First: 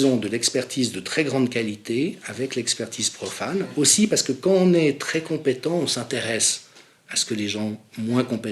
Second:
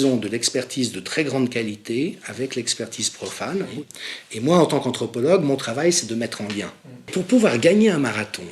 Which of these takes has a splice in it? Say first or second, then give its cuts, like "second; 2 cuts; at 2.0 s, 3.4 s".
second; 2 cuts; at 3.7 s, 7.1 s